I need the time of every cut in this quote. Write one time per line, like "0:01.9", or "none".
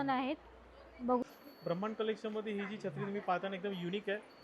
0:01.2